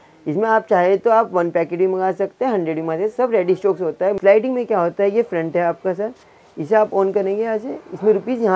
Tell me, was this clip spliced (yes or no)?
yes